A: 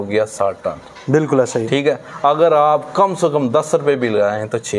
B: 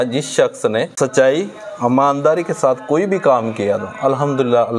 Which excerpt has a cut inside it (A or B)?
B